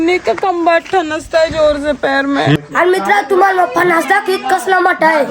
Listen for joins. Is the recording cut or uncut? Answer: cut